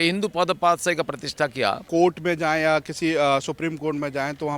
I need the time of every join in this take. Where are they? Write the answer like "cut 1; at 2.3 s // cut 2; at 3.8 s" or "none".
cut 1; at 1.8 s